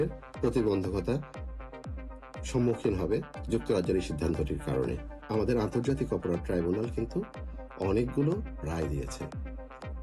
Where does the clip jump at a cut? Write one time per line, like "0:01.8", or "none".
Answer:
0:05.1